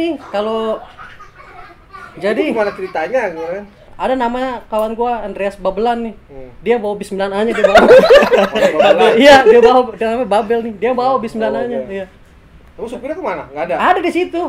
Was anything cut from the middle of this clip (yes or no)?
yes